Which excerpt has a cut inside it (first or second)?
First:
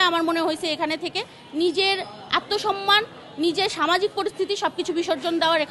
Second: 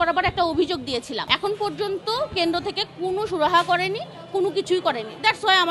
second